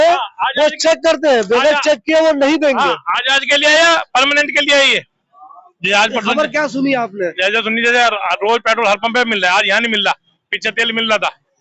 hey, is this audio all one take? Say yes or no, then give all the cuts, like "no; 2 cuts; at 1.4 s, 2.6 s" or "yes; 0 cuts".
yes; 0 cuts